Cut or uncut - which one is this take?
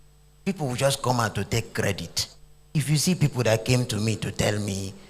cut